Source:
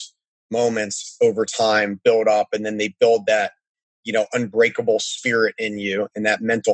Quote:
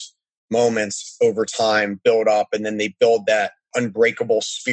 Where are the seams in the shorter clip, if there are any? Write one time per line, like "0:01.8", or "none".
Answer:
0:03.7